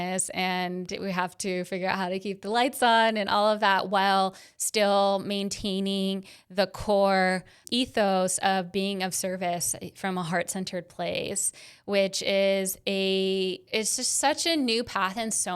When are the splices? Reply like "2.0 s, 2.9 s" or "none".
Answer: 7.6 s, 13.6 s